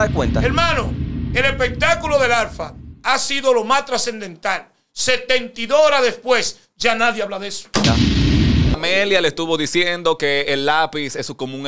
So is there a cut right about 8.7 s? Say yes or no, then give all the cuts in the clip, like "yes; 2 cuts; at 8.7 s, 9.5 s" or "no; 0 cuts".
yes; 1 cut; at 8.7 s